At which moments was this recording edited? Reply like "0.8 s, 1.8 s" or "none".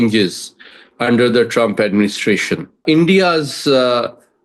2.8 s